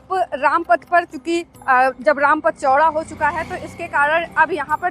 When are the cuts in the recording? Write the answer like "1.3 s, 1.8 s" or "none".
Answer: none